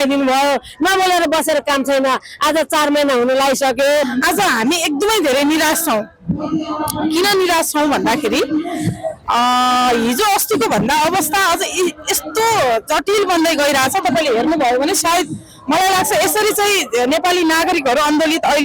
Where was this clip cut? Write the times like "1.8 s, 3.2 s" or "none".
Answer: 4.1 s